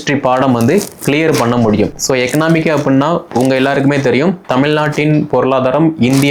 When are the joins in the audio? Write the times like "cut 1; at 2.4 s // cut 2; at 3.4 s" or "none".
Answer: cut 1; at 2.0 s